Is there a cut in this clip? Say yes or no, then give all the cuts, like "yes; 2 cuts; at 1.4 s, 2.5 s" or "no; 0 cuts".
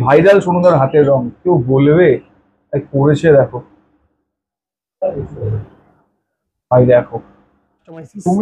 no; 0 cuts